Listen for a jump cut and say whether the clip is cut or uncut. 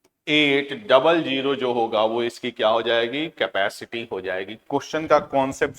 uncut